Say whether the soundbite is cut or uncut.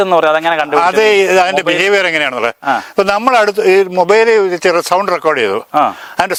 uncut